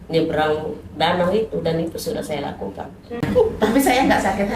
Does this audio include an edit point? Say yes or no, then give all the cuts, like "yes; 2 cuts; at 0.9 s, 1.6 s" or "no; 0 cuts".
yes; 1 cut; at 3.2 s